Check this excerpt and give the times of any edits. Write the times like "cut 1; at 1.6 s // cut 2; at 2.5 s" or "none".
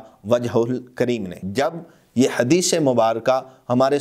none